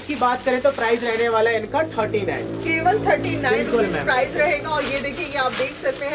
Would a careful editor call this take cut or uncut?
uncut